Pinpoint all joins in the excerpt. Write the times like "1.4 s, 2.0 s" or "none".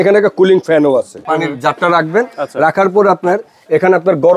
1.2 s